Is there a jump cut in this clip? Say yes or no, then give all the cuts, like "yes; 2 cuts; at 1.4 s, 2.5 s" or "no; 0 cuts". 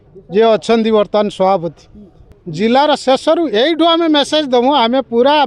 yes; 1 cut; at 2.4 s